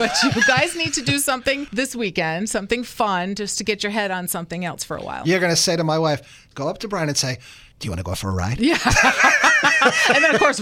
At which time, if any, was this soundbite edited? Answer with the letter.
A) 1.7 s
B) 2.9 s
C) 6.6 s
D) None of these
A